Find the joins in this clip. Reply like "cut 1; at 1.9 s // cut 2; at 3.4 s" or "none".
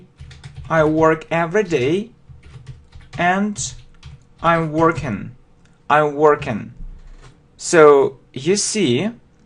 cut 1; at 8.3 s